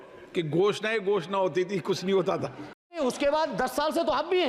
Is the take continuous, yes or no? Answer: no